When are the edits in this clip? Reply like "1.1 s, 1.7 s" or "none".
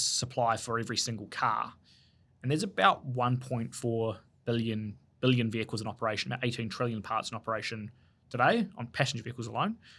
none

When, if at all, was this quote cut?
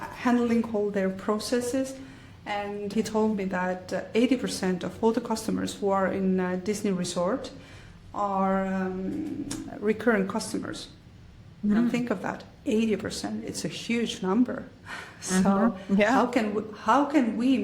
2.9 s

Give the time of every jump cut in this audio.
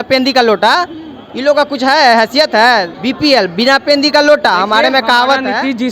none

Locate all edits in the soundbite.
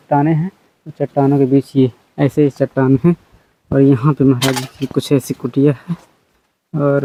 none

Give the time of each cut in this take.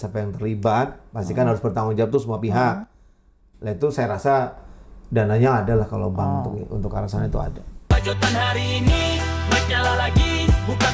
7.8 s

